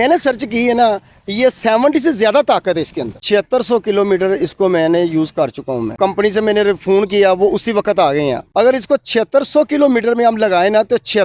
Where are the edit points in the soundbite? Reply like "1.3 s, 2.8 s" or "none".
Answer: 3.1 s, 5.9 s, 8.4 s